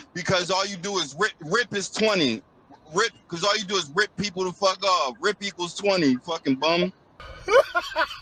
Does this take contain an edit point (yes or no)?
no